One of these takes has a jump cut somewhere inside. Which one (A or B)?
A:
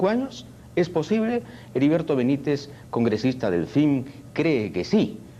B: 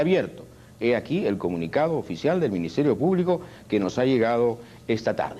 B